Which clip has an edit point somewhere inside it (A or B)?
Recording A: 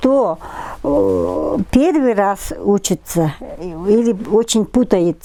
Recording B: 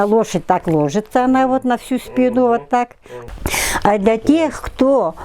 B